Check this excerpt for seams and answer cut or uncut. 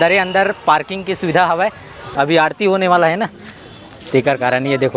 cut